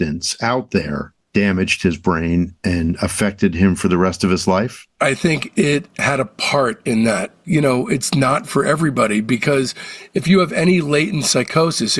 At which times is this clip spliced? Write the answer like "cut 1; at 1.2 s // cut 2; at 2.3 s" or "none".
cut 1; at 7.4 s

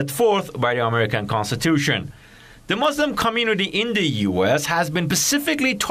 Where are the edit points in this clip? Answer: cut 1; at 2.6 s

